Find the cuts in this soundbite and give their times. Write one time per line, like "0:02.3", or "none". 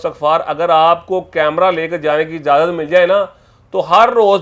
none